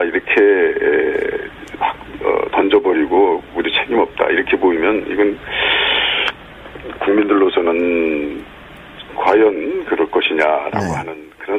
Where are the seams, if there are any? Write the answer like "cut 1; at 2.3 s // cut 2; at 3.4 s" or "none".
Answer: cut 1; at 1.8 s